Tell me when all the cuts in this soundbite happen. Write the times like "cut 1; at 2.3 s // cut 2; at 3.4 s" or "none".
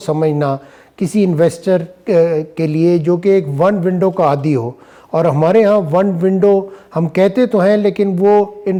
none